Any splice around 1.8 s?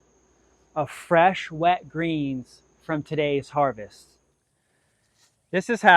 no; 1 cut; at 4.3 s

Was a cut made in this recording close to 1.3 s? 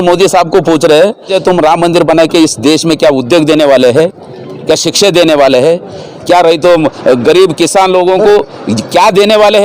yes; 1 cut; at 1.3 s

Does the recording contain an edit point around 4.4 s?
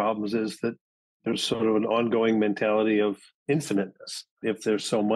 yes; 2 cuts; at 3.3 s, 4.4 s

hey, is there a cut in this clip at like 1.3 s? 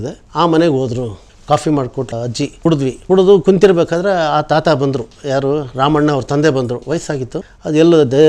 yes; 2 cuts; at 1.3 s, 2.7 s

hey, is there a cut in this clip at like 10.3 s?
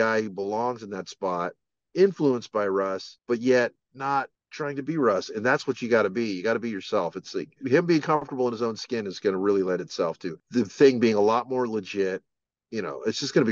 yes; 4 cuts; at 3.1 s, 4.4 s, 7.6 s, 10.3 s

